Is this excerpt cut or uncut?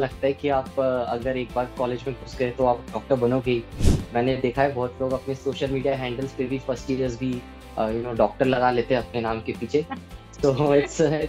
uncut